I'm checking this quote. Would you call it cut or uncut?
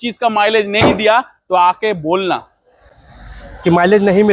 uncut